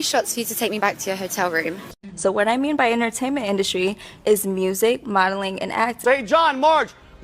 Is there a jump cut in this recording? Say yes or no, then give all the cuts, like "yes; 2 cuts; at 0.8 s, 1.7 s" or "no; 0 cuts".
yes; 2 cuts; at 1.8 s, 6.0 s